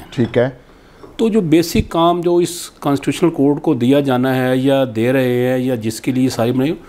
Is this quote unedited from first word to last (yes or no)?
yes